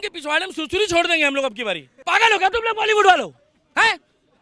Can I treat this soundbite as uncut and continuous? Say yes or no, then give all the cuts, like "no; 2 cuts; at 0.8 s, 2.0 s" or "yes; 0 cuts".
no; 1 cut; at 1.9 s